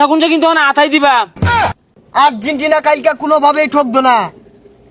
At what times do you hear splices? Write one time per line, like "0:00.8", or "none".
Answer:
0:01.7